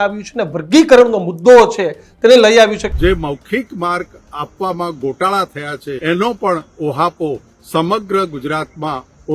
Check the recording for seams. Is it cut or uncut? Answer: cut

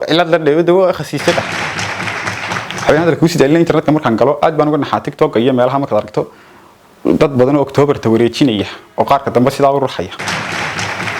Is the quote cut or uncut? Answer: cut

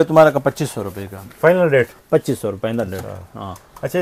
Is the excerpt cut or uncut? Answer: uncut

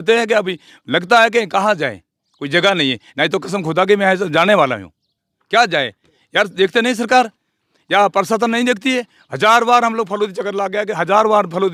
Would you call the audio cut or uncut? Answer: uncut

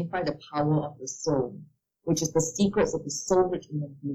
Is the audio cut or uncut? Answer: uncut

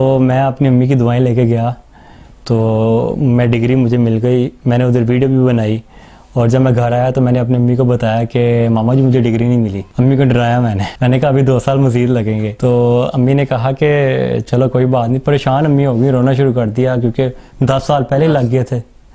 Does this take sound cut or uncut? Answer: cut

